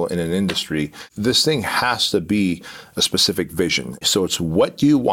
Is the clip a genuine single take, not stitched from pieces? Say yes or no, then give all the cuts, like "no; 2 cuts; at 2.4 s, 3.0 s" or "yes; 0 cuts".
no; 2 cuts; at 1.0 s, 4.0 s